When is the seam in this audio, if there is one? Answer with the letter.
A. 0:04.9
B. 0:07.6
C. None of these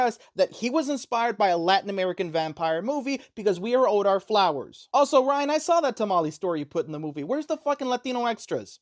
C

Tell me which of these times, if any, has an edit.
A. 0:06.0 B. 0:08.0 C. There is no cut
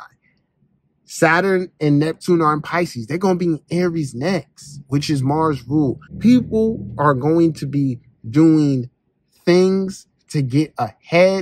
A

